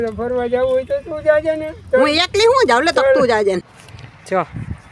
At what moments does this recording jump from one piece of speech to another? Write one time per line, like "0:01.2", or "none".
0:03.6